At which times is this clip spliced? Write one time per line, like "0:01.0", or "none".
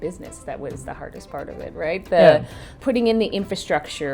0:02.8